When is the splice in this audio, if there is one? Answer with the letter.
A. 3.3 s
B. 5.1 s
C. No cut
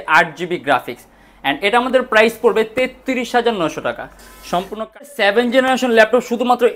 B